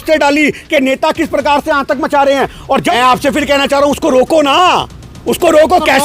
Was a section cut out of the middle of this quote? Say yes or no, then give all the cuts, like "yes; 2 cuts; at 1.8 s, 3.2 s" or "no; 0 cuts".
yes; 1 cut; at 2.9 s